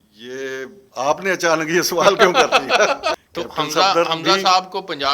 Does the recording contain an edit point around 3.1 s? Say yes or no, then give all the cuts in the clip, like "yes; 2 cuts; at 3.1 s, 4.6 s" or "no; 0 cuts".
yes; 1 cut; at 3.1 s